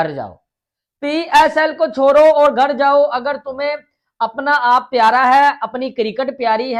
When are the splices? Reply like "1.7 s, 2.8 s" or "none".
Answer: none